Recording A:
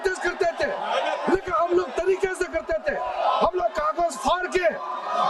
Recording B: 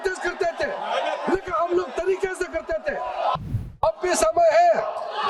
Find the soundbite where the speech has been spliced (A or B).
B